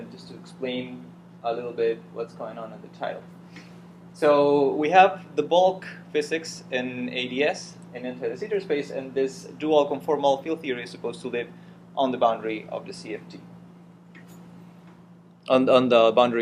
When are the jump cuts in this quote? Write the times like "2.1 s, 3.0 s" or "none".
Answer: 2.5 s

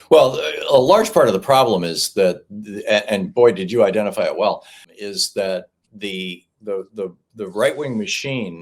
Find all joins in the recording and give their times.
4.9 s

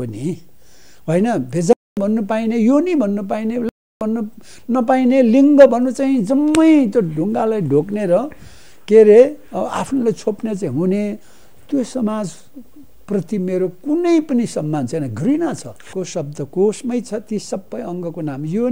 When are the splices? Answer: 15.9 s

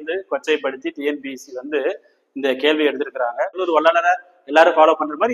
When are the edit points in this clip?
3.6 s

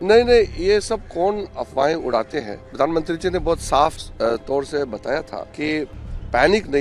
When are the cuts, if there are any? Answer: 2.6 s, 4.0 s, 5.4 s

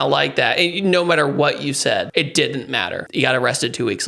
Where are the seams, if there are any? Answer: 2.1 s, 3.0 s

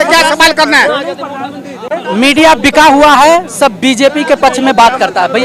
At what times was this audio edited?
none

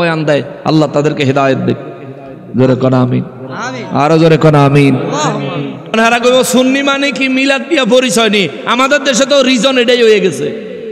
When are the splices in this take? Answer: 5.9 s

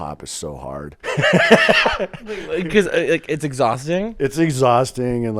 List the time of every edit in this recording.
0.9 s

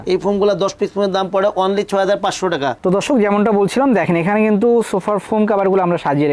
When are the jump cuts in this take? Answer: 2.8 s

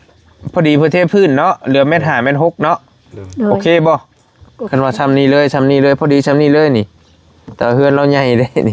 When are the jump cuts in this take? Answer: none

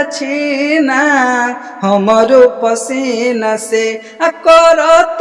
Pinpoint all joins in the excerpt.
none

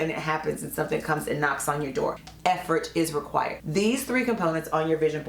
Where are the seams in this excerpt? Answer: 2.3 s

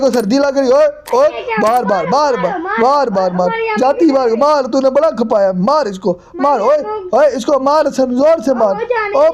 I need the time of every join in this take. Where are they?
none

